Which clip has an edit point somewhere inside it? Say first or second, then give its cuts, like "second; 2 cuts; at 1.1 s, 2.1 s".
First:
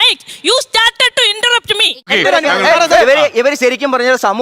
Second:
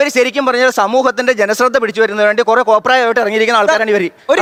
first; 1 cut; at 2.0 s